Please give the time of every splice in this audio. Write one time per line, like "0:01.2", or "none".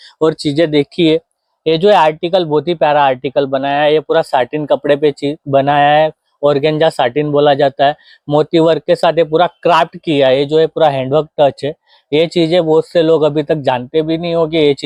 none